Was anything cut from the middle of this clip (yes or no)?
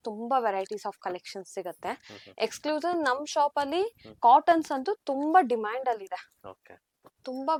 no